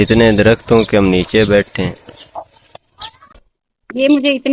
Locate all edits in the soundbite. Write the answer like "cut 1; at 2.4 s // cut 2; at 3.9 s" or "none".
cut 1; at 3.3 s